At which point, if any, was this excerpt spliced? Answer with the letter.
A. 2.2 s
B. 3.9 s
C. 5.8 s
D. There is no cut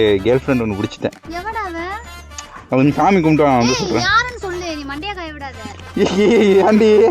C